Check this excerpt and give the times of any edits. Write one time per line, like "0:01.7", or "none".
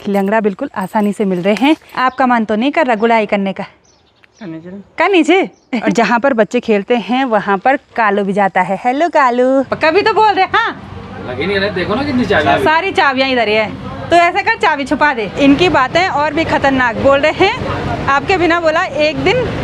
0:01.9
0:05.8
0:09.7
0:15.3